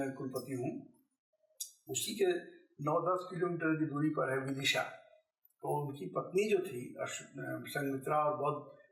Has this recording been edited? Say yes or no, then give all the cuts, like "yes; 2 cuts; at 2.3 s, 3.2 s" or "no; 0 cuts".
no; 0 cuts